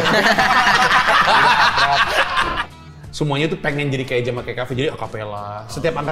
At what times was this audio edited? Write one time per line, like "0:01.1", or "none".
0:02.5